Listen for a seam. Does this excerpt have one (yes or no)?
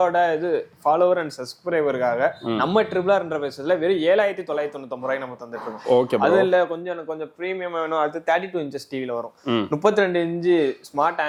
no